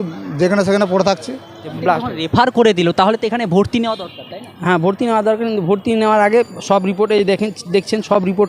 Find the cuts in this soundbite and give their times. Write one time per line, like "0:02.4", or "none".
0:01.8

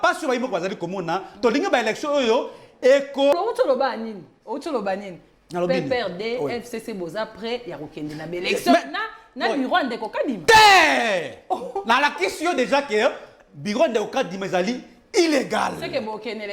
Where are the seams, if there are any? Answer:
0:03.3

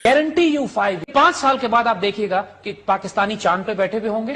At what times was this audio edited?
0:01.1

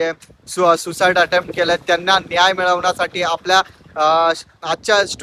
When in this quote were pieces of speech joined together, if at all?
none

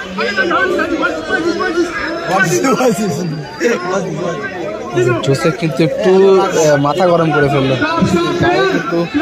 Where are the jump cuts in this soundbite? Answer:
none

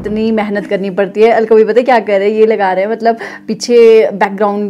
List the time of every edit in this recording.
none

